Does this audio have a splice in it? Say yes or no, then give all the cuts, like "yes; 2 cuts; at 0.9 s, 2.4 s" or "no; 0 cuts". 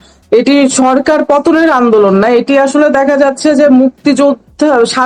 no; 0 cuts